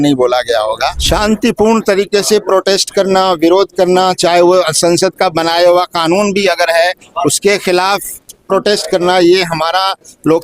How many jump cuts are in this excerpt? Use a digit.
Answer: 1